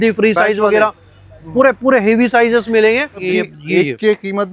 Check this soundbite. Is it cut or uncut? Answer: cut